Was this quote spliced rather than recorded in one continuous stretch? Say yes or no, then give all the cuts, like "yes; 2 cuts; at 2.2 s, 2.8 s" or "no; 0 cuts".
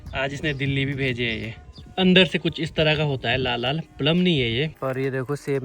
yes; 2 cuts; at 1.6 s, 4.7 s